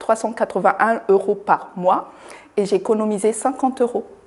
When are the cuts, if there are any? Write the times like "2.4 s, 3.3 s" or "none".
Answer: none